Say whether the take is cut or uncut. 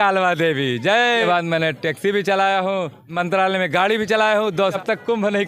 cut